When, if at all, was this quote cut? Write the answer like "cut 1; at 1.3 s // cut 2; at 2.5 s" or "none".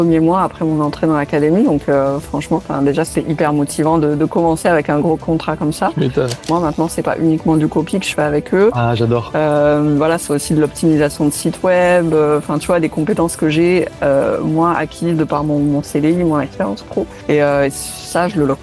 cut 1; at 5.2 s // cut 2; at 6.5 s // cut 3; at 17.2 s